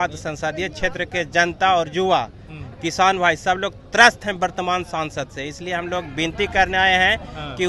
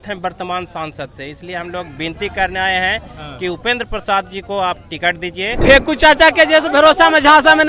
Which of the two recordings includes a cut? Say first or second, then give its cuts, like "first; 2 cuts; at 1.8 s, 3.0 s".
second; 1 cut; at 5.6 s